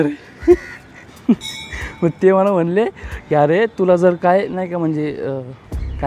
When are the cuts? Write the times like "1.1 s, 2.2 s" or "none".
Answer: 1.0 s